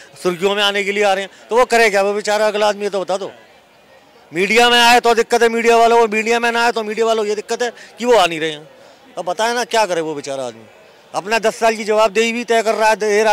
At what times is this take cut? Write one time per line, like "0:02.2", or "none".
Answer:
none